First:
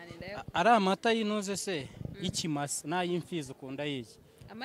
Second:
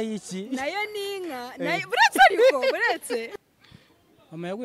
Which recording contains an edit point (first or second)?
second